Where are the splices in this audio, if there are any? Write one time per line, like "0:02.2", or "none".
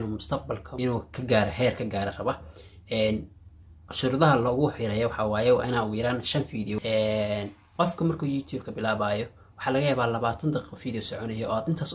0:00.9
0:06.8